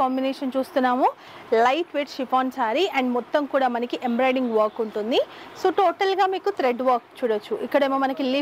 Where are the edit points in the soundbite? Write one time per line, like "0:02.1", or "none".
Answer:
0:01.3